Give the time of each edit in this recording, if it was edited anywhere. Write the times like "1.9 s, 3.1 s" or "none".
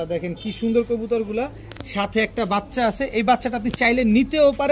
none